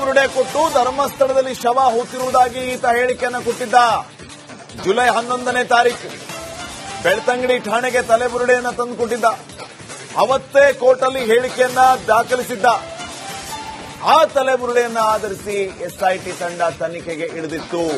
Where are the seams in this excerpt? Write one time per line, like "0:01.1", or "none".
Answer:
none